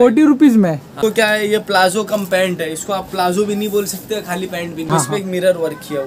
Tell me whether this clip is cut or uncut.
cut